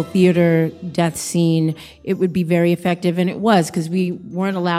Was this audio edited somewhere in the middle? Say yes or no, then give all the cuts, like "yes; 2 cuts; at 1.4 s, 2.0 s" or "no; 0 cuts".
no; 0 cuts